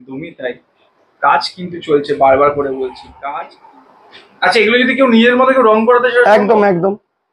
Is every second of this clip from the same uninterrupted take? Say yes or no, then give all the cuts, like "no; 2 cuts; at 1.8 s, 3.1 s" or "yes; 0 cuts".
no; 1 cut; at 3.5 s